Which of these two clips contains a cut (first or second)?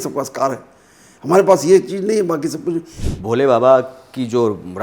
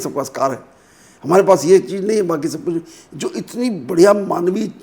first